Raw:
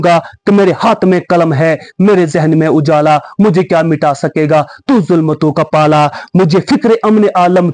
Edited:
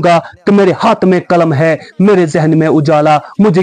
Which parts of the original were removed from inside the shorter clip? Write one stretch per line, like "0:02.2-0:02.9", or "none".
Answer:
none